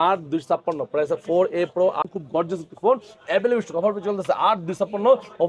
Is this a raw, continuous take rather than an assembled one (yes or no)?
no